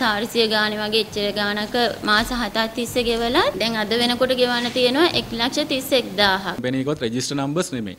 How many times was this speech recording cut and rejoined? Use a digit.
2